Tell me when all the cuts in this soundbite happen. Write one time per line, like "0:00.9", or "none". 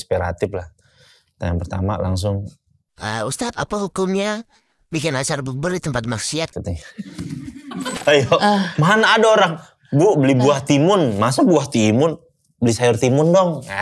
0:08.0